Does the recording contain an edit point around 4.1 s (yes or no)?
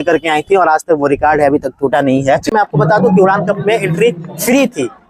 no